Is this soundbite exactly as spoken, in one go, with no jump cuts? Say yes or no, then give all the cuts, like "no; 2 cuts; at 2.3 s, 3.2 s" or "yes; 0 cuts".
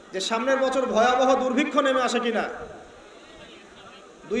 yes; 0 cuts